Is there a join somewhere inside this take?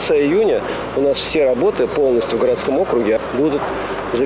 yes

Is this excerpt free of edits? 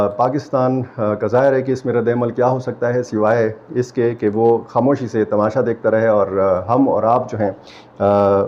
yes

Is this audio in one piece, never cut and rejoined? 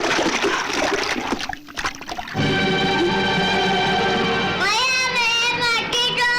yes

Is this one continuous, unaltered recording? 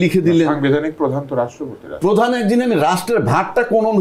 yes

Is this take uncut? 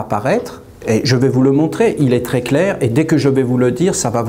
yes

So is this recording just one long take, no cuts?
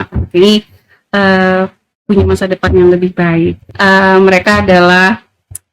no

